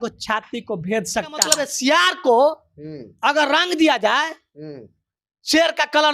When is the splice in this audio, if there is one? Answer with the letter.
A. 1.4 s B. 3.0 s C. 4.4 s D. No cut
A